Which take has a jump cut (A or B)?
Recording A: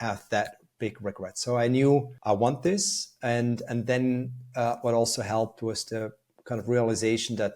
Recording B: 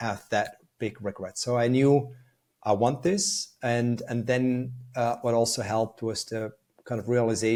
A